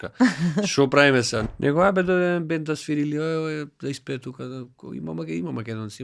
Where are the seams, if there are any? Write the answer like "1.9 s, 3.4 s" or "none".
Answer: 1.4 s